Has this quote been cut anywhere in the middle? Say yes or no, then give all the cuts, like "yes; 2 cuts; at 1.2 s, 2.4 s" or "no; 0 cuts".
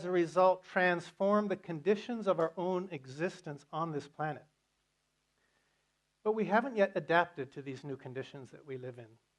yes; 1 cut; at 4.1 s